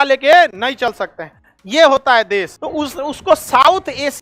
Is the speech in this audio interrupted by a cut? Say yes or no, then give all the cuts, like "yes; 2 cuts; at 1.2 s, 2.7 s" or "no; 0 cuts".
yes; 1 cut; at 2.6 s